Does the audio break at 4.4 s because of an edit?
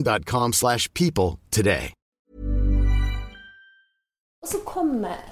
yes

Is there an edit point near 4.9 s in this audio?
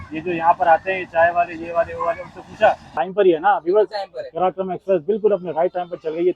no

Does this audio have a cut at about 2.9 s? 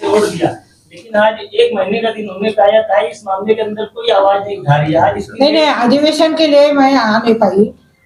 no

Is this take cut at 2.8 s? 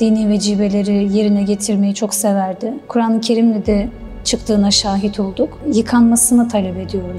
yes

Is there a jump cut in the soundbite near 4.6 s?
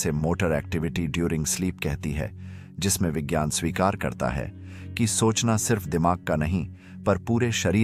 no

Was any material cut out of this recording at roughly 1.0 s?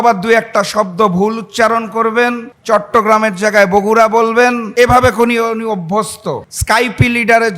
no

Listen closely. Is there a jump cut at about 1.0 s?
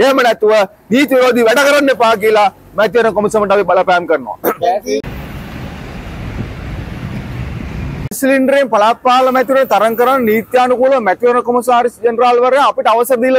no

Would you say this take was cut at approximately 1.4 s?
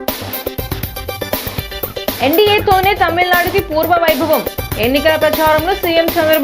yes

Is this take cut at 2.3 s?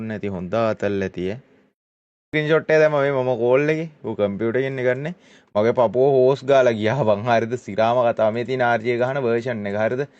yes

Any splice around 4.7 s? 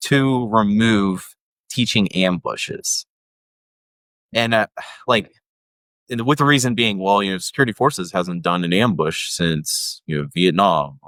no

